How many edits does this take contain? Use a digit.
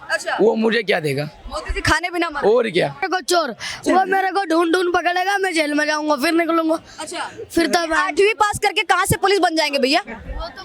1